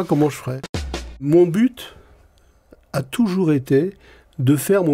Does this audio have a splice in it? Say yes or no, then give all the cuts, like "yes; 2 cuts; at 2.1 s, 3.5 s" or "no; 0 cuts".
yes; 1 cut; at 1.2 s